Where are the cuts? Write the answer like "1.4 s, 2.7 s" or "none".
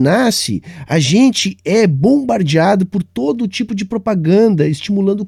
none